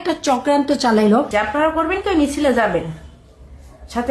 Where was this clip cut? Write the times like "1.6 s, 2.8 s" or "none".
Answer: 1.3 s